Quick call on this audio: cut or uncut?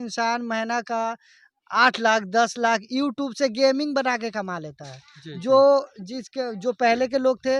uncut